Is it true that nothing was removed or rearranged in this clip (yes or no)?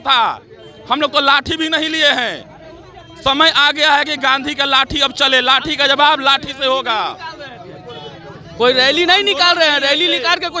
yes